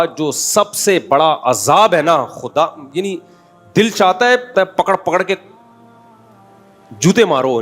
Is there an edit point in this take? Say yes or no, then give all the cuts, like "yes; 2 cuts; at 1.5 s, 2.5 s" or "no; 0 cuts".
yes; 1 cut; at 4.5 s